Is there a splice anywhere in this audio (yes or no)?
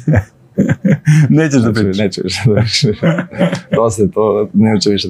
no